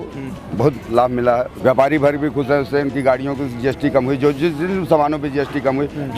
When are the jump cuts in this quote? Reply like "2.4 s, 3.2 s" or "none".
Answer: 1.5 s